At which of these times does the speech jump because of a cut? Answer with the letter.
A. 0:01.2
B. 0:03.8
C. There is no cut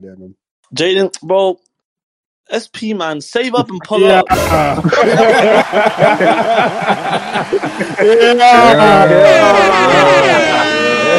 C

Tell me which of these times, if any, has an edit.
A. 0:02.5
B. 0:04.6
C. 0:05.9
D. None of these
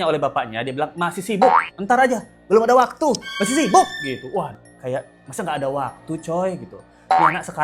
B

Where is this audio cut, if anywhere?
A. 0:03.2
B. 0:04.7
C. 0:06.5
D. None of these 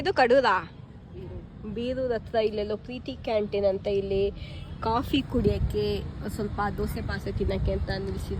D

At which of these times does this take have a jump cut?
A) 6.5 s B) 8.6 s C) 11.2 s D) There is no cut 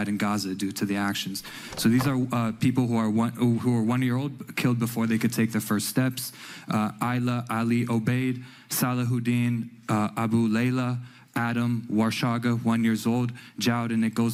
D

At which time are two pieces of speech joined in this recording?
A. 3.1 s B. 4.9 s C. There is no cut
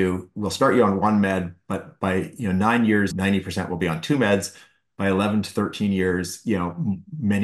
A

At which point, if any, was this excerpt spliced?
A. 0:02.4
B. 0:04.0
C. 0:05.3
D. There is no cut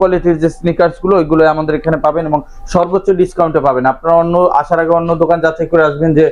D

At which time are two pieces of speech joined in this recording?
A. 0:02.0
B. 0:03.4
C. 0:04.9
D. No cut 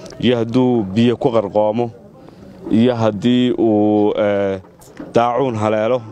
D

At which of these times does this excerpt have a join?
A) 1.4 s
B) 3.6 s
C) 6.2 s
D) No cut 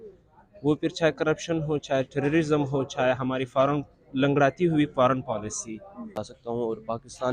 C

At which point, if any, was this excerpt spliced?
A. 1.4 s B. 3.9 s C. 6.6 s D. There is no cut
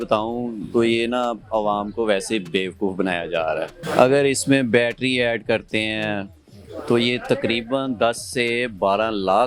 B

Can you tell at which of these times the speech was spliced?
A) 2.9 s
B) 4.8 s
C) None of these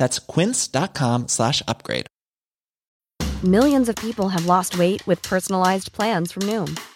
A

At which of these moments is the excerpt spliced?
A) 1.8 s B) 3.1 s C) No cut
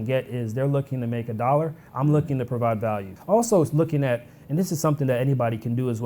B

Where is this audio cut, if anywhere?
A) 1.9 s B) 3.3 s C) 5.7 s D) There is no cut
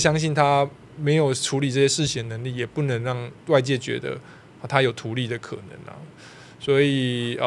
D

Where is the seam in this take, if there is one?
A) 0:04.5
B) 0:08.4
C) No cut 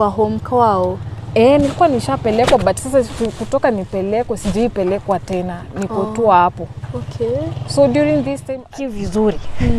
B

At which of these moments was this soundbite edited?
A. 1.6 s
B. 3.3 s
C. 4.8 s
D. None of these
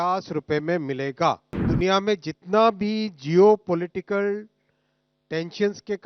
A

